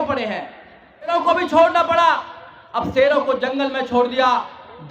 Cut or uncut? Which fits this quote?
cut